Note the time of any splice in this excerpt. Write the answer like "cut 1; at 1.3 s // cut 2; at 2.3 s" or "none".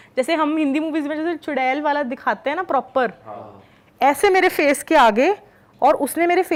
none